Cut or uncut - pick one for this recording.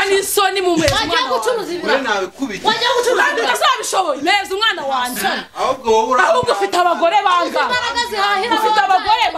uncut